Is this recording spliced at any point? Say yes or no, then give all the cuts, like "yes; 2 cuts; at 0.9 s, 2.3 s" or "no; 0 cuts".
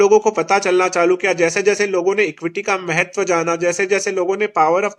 no; 0 cuts